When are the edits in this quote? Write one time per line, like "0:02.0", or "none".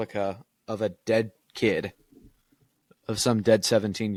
none